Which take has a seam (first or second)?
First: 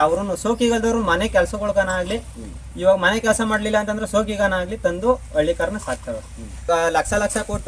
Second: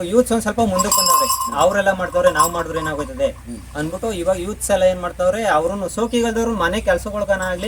first